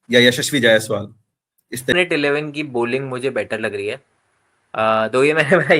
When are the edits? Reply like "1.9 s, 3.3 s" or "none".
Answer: 1.9 s